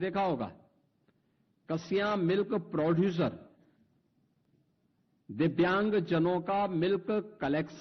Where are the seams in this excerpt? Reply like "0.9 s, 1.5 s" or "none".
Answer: 4.4 s

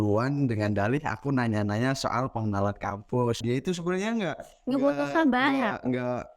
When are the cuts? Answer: 3.4 s

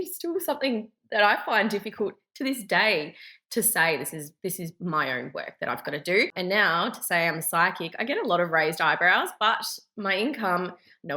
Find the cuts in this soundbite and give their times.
6.3 s

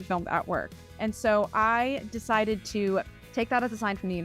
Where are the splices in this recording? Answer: 1.0 s, 3.2 s

